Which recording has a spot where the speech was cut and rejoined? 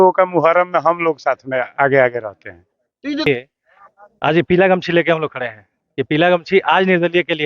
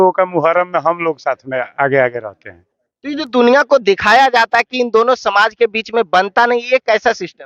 first; 1 cut; at 3.3 s

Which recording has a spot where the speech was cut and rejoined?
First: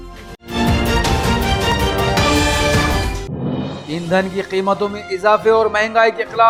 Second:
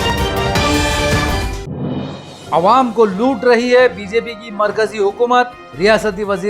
second; 1 cut; at 2.2 s

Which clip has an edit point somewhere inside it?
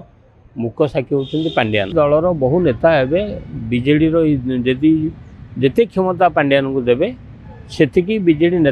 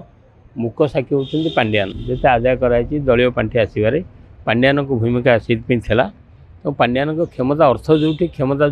first; 1 cut; at 1.9 s

